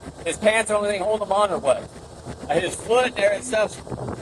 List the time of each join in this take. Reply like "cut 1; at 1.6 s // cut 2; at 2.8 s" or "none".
cut 1; at 1.9 s